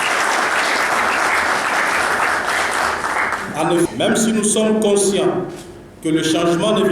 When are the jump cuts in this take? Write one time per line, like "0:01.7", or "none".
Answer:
0:03.9